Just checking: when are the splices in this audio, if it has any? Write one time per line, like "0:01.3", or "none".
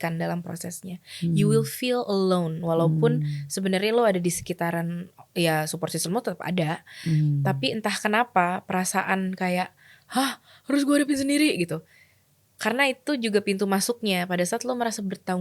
none